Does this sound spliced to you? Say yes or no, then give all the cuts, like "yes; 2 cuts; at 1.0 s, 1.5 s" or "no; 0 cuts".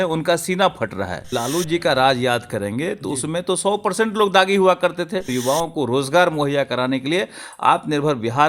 yes; 2 cuts; at 1.3 s, 5.3 s